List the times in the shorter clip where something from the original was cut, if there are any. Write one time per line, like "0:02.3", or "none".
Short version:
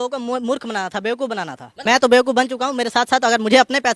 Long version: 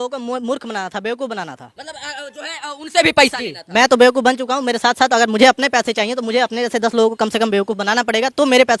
0:01.7